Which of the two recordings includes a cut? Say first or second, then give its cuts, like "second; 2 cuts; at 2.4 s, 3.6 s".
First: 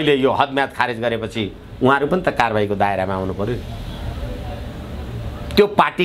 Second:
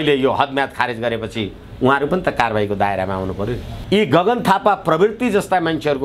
second; 1 cut; at 3.7 s